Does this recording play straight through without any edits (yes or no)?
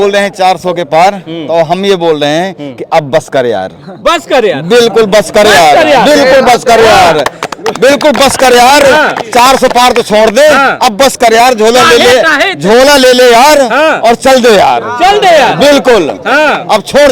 yes